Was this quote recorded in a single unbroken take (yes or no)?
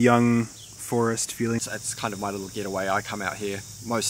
no